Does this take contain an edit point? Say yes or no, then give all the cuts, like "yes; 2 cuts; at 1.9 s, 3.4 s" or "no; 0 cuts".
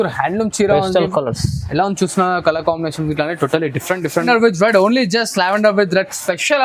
yes; 1 cut; at 4.2 s